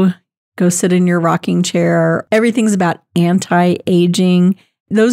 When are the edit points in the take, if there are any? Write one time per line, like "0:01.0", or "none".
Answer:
0:02.2